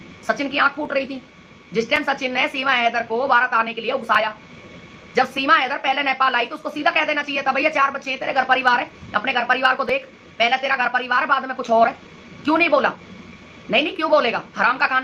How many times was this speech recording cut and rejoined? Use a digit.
0